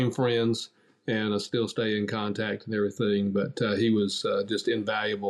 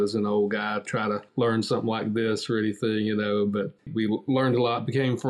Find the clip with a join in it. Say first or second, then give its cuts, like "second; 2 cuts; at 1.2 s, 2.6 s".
second; 2 cuts; at 1.3 s, 3.8 s